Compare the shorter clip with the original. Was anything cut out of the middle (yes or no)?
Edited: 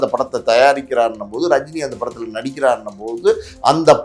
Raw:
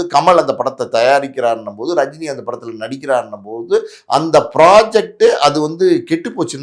no